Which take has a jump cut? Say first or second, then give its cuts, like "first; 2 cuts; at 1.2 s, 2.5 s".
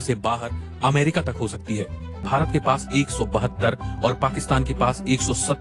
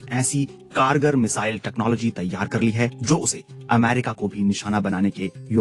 first; 1 cut; at 2.3 s